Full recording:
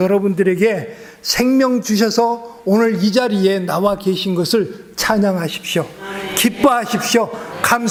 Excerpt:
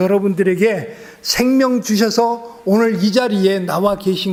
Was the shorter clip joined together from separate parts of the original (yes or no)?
no